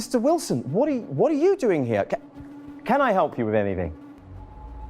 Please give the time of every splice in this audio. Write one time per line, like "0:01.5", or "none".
0:04.0